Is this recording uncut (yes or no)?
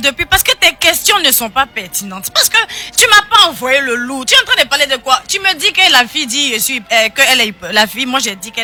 yes